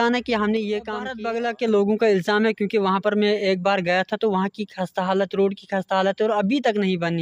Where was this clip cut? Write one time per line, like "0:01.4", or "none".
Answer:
0:01.1